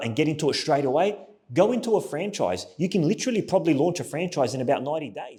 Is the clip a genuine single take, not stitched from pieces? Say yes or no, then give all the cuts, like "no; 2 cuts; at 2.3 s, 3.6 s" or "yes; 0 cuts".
yes; 0 cuts